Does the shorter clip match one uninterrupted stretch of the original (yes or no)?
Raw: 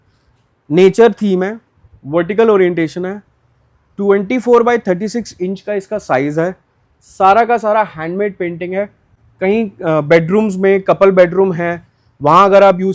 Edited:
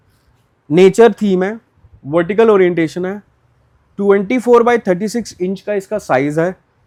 yes